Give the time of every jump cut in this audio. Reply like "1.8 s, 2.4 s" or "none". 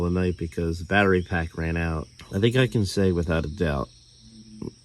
2.1 s